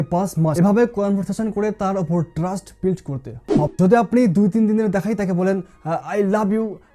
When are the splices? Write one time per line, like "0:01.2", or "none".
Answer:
0:03.7